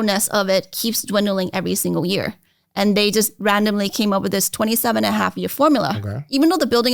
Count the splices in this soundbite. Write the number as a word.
zero